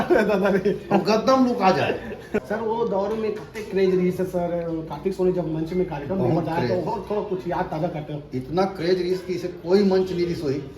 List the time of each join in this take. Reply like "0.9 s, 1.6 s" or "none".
2.4 s